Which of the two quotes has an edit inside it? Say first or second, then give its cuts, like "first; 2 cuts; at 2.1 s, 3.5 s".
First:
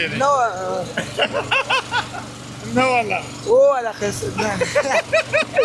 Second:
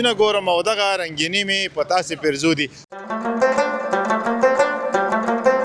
second; 1 cut; at 2.7 s